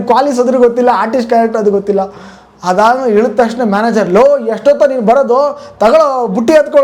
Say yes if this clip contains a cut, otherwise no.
no